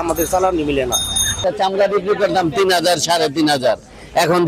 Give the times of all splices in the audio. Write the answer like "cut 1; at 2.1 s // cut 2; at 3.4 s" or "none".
cut 1; at 1.4 s